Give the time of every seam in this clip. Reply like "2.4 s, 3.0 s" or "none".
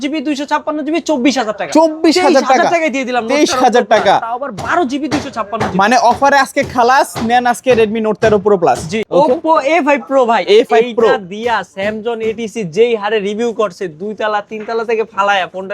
8.9 s